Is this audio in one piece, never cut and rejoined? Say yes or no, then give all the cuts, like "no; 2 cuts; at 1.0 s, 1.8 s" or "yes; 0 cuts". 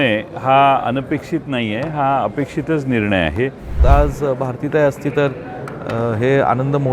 no; 1 cut; at 3.8 s